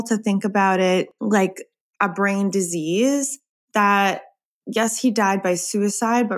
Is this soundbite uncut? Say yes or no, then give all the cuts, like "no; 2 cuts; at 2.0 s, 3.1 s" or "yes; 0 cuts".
no; 1 cut; at 1.1 s